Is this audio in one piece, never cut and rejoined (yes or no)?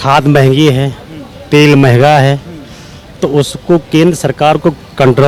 yes